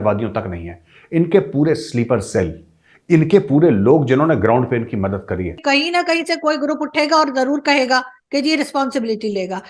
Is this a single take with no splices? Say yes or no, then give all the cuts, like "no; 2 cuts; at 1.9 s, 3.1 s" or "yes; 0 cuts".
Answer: no; 1 cut; at 5.6 s